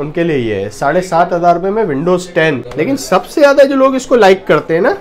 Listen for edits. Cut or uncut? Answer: cut